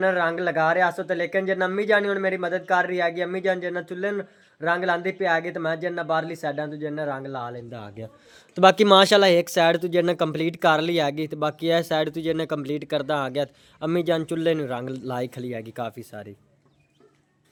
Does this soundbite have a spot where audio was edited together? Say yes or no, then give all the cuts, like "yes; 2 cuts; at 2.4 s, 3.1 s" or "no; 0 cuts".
no; 0 cuts